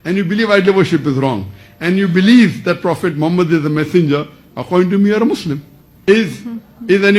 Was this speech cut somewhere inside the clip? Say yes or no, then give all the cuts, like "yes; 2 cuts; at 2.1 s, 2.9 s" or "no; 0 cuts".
yes; 1 cut; at 5.9 s